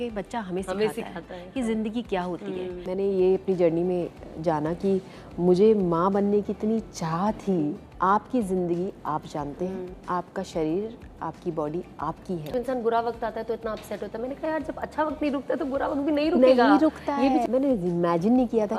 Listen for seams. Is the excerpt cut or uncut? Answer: cut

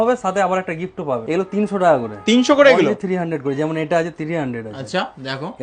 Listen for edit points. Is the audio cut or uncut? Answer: cut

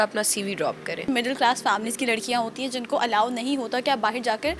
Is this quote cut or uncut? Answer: cut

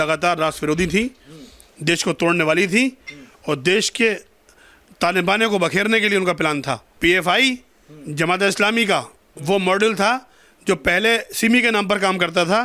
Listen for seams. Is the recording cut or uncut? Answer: cut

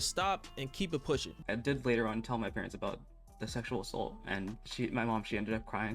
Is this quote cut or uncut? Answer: cut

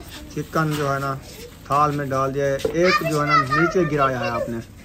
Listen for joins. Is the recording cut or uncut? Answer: uncut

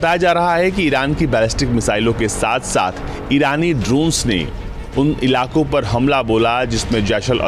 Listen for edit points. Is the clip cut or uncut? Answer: uncut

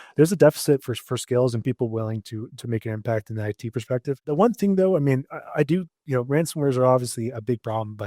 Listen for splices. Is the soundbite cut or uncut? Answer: cut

